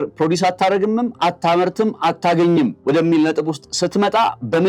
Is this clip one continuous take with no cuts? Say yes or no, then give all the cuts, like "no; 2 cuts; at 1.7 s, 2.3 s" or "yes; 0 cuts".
no; 1 cut; at 2.8 s